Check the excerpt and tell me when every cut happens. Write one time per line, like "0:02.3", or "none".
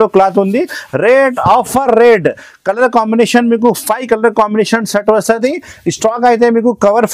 none